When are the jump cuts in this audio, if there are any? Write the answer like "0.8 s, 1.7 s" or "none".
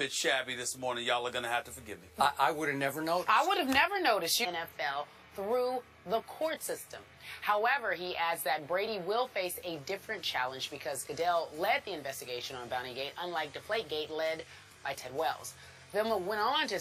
none